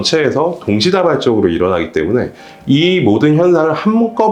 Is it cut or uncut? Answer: uncut